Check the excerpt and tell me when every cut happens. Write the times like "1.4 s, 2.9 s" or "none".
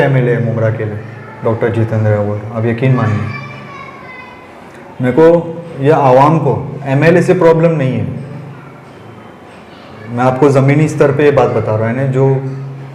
none